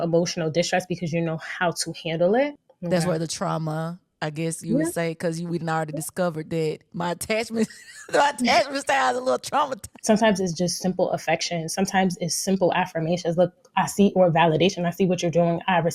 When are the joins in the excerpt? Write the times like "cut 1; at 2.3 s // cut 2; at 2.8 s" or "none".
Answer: cut 1; at 2.7 s // cut 2; at 9.9 s